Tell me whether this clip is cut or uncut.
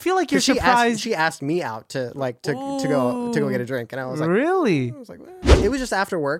cut